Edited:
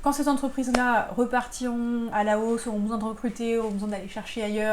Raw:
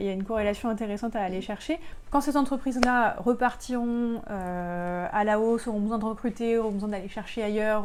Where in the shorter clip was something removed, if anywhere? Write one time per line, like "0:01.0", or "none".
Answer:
0:02.1